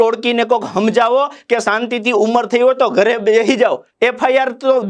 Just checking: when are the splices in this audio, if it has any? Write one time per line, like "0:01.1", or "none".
0:03.9

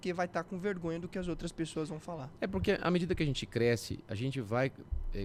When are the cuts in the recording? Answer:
none

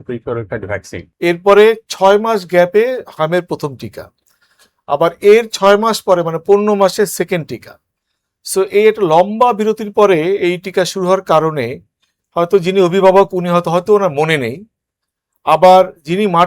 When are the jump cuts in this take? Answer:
0:01.0

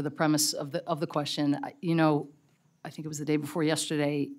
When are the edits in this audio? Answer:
none

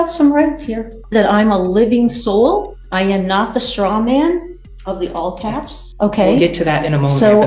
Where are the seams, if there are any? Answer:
0:01.0
0:02.8
0:05.9

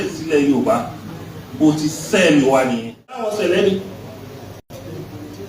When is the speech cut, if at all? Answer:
0:03.3

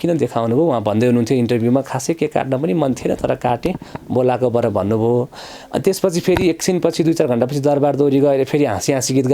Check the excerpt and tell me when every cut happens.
none

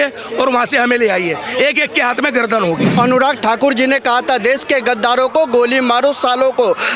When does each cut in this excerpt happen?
0:03.0

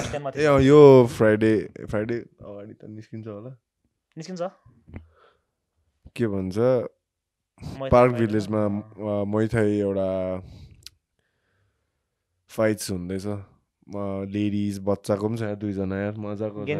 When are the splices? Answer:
none

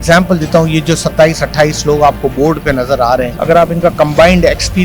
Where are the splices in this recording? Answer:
0:03.3

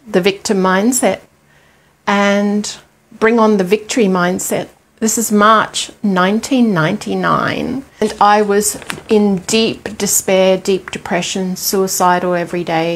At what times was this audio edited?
0:04.8
0:08.0

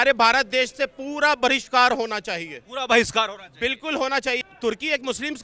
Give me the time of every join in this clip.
0:04.4

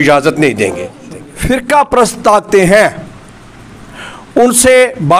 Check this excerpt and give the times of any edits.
0:01.1

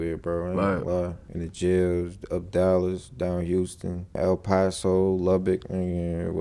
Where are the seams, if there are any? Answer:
none

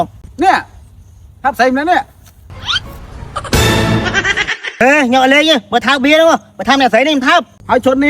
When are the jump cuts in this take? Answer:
0:04.8

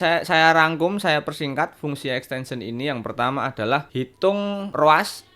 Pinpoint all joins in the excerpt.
0:04.2

